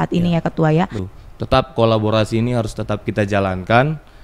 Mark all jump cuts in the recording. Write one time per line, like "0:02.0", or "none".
0:01.1